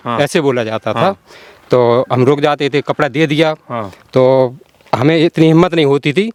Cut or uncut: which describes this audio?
uncut